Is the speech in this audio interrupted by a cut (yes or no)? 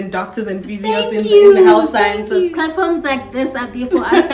yes